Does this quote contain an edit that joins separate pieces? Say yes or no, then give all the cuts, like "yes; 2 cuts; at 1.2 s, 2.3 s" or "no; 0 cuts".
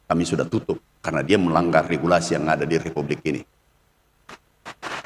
no; 0 cuts